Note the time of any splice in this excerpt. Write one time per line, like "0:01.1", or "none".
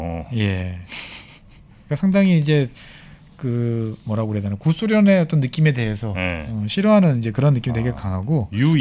none